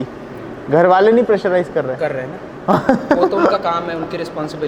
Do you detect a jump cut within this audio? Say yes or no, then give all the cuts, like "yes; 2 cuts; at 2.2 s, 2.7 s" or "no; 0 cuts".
no; 0 cuts